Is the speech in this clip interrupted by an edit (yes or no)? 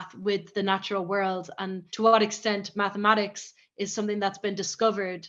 no